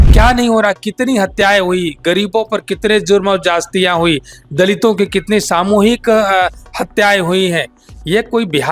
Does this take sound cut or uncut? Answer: uncut